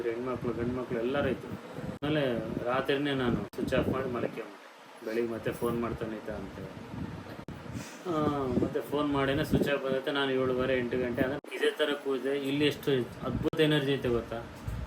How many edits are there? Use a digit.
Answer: 2